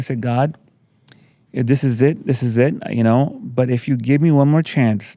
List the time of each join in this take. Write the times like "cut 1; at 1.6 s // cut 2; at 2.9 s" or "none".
none